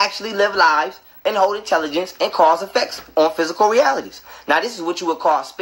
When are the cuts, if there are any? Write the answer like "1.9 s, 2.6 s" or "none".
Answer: none